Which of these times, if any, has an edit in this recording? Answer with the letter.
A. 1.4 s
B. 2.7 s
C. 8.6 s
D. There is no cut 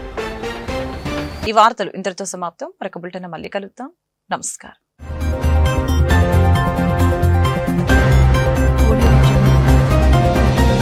D